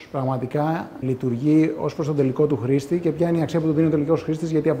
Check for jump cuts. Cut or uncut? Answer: cut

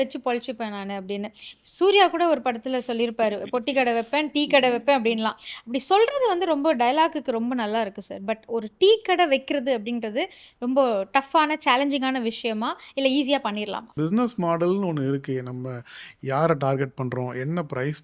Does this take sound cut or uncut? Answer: cut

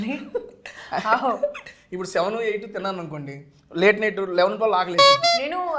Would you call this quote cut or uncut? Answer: uncut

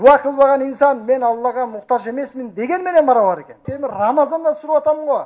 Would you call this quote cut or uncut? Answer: cut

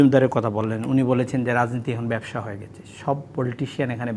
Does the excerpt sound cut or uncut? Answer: uncut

